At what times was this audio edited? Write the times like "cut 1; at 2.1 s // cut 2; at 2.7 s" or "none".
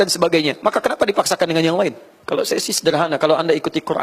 cut 1; at 2.1 s